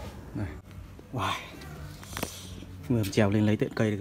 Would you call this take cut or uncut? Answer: cut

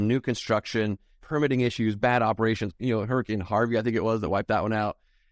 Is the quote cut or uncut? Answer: cut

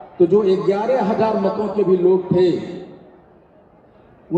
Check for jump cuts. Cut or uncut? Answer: uncut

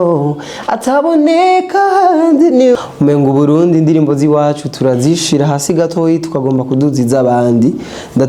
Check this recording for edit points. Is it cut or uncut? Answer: cut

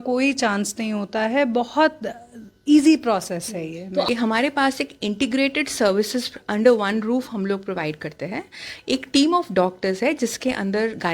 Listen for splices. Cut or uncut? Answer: cut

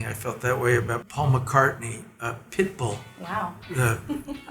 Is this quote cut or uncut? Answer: cut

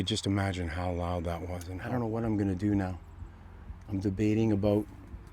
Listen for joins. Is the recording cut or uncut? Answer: cut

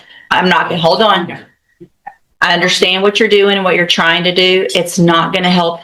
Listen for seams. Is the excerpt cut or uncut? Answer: uncut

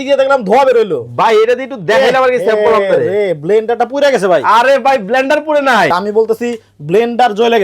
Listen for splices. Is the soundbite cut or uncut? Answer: cut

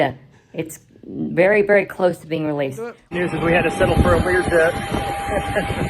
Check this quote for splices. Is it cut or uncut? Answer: cut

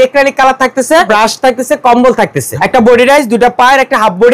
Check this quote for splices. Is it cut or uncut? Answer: cut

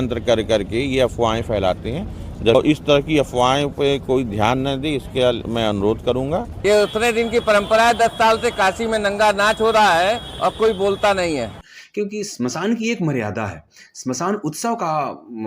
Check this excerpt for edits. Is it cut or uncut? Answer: cut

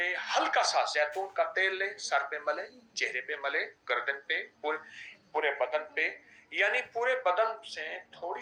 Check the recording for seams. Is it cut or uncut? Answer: uncut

